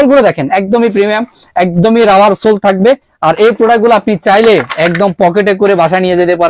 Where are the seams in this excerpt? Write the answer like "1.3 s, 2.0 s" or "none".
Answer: none